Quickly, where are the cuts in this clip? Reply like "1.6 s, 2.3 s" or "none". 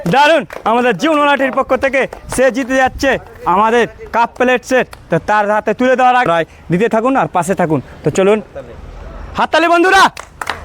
6.3 s